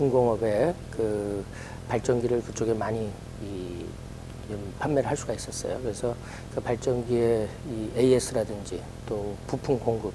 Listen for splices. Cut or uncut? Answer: uncut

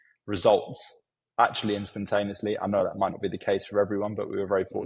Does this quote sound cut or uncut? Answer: uncut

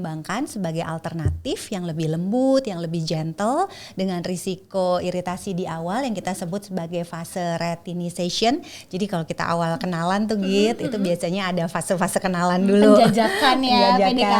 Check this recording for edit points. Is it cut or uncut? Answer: uncut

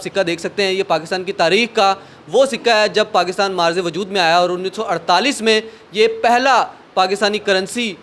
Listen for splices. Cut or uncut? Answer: uncut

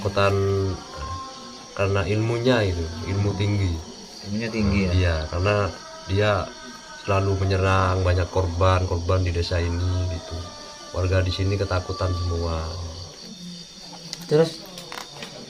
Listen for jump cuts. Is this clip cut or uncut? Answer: cut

